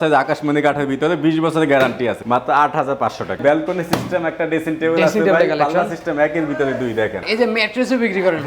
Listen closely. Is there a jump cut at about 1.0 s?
no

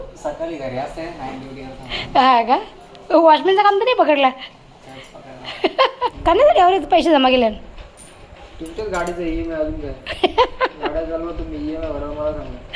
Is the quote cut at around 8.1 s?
no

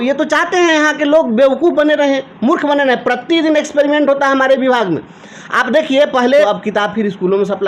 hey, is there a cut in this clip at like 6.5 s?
yes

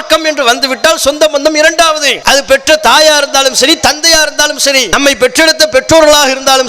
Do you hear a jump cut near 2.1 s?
yes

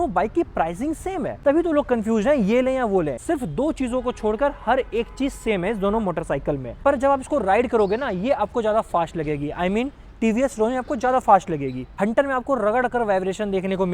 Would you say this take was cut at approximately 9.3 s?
no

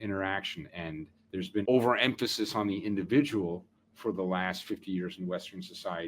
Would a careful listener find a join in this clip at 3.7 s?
no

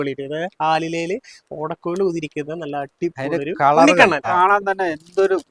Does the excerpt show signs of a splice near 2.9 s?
no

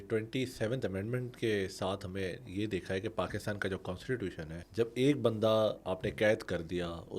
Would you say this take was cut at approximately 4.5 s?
yes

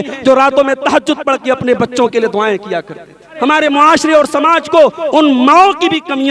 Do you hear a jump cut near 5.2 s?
no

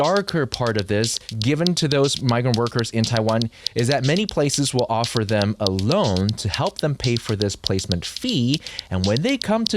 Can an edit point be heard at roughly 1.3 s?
yes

